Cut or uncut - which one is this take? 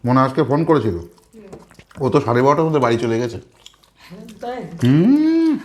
uncut